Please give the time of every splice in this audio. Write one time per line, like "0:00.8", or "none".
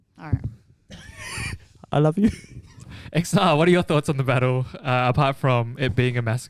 0:02.8